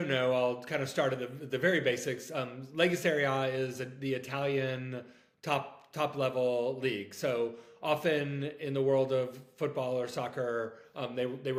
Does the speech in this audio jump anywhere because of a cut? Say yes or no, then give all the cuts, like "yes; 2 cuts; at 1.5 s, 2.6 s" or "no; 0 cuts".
no; 0 cuts